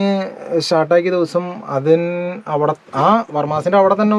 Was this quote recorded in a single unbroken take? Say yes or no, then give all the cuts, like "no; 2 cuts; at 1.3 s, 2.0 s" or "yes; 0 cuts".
yes; 0 cuts